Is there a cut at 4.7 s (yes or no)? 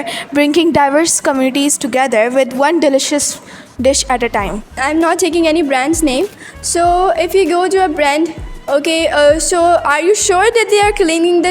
yes